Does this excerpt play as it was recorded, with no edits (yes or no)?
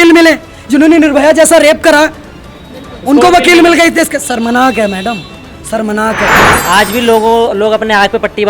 no